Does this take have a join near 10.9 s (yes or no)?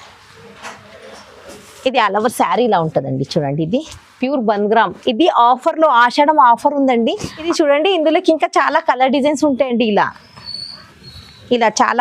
no